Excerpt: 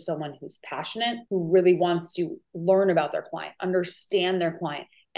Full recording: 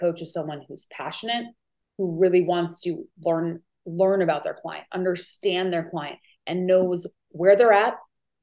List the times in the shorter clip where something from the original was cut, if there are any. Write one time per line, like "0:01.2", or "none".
0:01.2
0:02.4